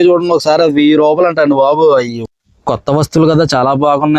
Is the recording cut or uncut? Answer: cut